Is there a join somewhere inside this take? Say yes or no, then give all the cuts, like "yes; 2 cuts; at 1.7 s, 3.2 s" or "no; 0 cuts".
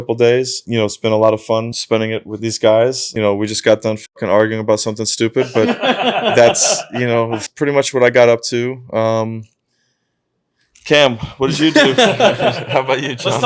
yes; 1 cut; at 7.4 s